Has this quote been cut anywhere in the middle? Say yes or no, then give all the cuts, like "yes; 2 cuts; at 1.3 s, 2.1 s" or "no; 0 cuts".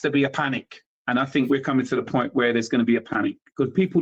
no; 0 cuts